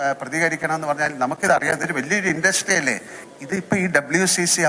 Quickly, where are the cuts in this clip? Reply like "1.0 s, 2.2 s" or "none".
3.1 s